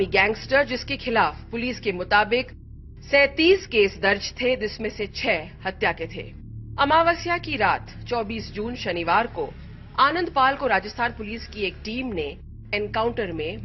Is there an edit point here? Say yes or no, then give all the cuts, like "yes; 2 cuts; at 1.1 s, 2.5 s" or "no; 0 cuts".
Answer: no; 0 cuts